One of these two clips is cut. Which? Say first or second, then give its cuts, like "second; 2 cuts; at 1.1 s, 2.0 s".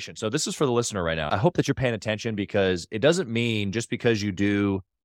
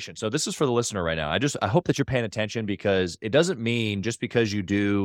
first; 1 cut; at 1.3 s